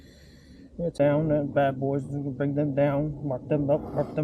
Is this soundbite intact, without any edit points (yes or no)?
no